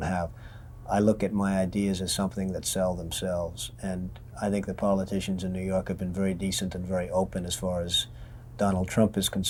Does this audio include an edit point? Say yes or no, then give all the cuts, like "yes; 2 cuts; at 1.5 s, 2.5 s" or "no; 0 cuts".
no; 0 cuts